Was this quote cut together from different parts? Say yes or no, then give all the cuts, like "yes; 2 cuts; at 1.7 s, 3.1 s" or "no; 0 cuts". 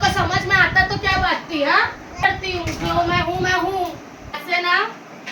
yes; 2 cuts; at 2.2 s, 4.4 s